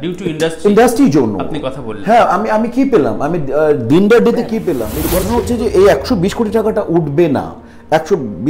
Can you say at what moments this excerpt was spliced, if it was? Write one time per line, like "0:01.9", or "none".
0:04.9